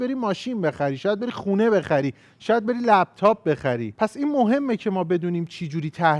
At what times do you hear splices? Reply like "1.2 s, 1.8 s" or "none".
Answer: none